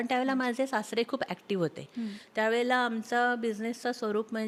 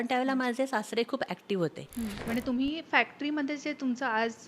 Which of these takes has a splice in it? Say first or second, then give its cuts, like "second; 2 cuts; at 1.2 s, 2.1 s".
second; 1 cut; at 2.2 s